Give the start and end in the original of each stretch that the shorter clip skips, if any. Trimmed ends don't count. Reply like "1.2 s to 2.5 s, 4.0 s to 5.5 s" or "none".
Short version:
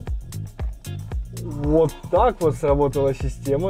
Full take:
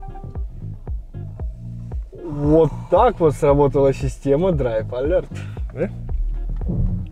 1.7 s to 2.2 s